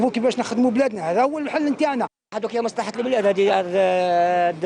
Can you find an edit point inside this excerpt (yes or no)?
yes